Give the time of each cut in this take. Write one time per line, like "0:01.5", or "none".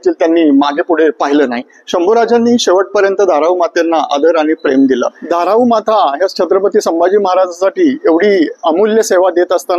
0:05.2